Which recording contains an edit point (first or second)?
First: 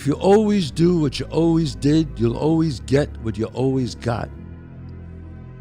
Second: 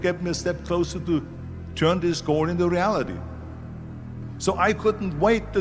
first